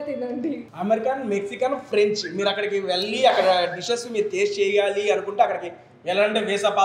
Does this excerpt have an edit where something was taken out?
no; 0 cuts

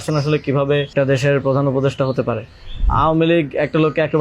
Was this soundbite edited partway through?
yes; 2 cuts; at 0.9 s, 2.8 s

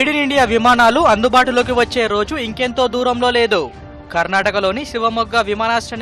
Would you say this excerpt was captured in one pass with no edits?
yes; 0 cuts

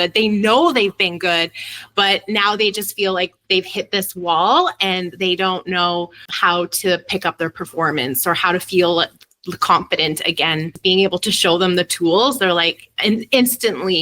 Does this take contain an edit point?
yes; 2 cuts; at 6.2 s, 10.8 s

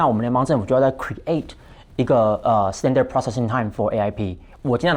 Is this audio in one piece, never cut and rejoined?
yes; 0 cuts

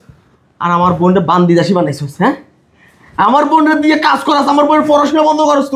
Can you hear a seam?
no; 0 cuts

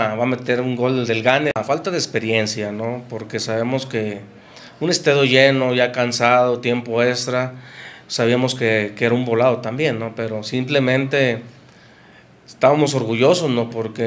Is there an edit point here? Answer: yes; 1 cut; at 1.6 s

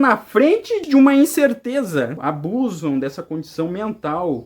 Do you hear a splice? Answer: yes; 1 cut; at 2.2 s

